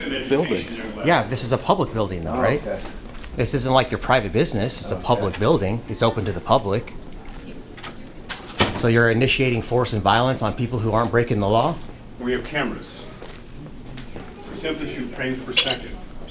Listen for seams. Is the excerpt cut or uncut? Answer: uncut